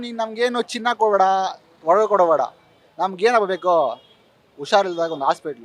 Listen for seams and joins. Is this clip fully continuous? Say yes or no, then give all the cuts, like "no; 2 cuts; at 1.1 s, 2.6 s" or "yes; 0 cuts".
yes; 0 cuts